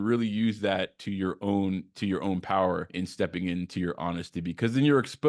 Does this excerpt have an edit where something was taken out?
yes; 1 cut; at 2.9 s

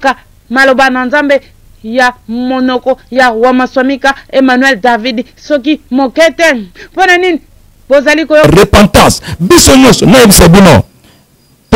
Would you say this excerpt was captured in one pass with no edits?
no; 1 cut; at 8.4 s

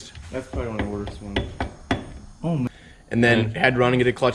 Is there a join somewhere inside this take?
yes; 1 cut; at 2.7 s

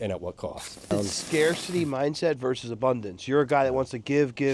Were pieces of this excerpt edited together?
yes; 1 cut; at 0.9 s

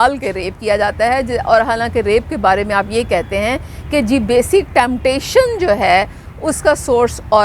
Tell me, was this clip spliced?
no; 0 cuts

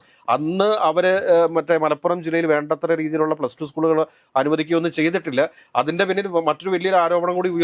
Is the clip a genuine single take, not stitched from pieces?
yes; 0 cuts

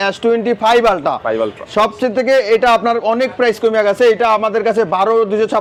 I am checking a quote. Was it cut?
no; 0 cuts

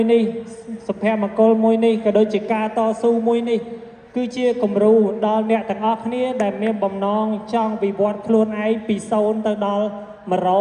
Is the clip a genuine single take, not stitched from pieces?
yes; 0 cuts

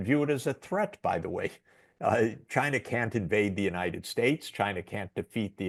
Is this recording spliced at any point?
no; 0 cuts

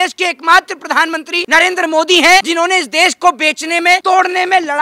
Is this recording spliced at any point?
yes; 3 cuts; at 1.4 s, 2.5 s, 4.0 s

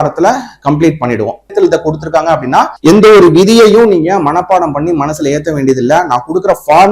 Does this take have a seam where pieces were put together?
yes; 2 cuts; at 1.5 s, 2.7 s

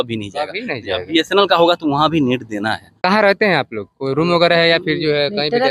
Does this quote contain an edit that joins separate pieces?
yes; 1 cut; at 3.0 s

